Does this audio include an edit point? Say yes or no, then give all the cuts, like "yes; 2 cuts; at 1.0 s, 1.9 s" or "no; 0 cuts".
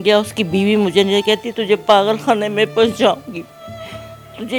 no; 0 cuts